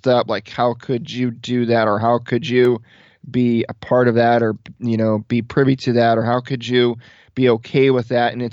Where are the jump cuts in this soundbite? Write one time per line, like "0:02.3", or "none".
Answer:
none